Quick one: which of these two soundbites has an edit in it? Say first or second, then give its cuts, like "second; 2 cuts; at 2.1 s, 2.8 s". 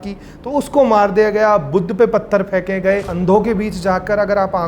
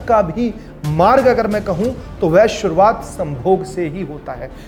first; 1 cut; at 3.1 s